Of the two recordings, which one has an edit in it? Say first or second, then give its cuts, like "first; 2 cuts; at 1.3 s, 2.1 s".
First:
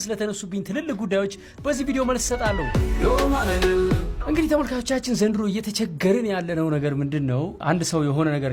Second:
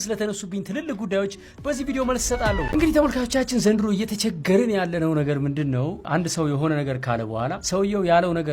second; 1 cut; at 2.6 s